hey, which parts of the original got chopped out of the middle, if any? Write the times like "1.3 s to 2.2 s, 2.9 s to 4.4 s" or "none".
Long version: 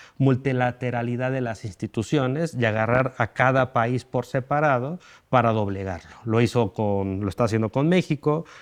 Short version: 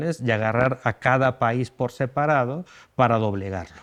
none